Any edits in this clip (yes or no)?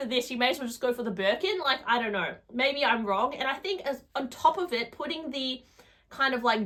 no